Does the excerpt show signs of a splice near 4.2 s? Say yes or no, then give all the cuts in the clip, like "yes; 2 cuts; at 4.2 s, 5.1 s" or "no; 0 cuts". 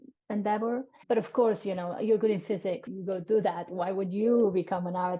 no; 2 cuts; at 1.0 s, 2.9 s